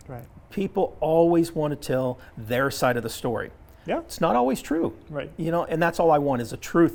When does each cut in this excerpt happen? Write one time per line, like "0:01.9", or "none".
none